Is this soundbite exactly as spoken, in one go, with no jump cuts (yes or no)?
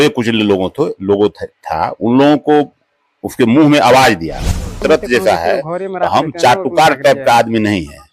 no